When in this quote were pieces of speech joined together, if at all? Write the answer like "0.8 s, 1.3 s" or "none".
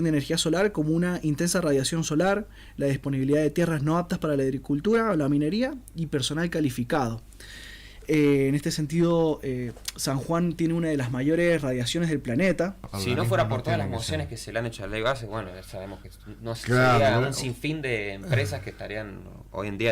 12.8 s